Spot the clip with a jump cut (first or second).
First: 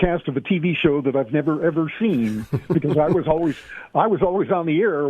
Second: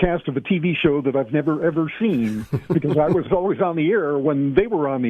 second